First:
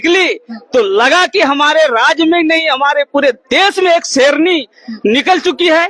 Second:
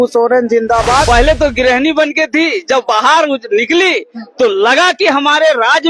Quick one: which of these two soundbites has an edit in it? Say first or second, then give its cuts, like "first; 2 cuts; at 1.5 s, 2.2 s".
second; 1 cut; at 1.1 s